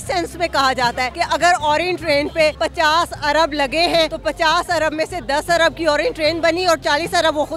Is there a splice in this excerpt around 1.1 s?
yes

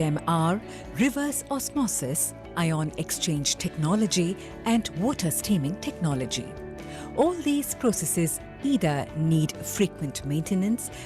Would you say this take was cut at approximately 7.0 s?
yes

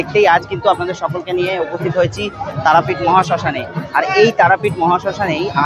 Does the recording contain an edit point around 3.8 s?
no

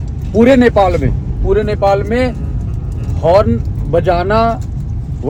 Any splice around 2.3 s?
no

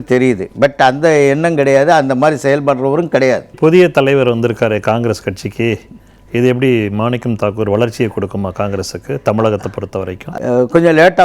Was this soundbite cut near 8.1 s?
no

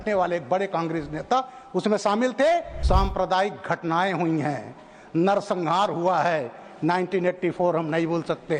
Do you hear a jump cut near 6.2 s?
no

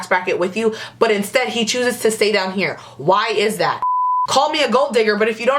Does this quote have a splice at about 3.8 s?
yes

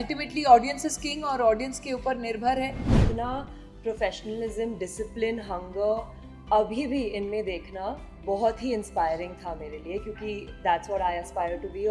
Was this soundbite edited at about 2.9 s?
yes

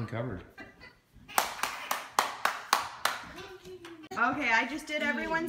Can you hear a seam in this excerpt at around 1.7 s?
no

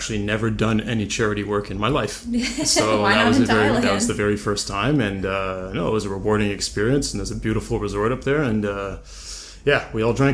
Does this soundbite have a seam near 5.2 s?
yes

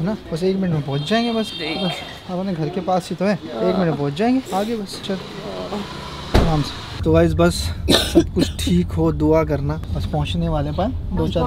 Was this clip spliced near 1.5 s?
no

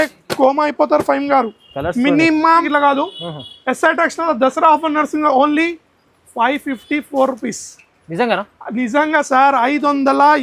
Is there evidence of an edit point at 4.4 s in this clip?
no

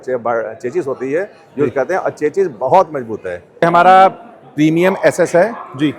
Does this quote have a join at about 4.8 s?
no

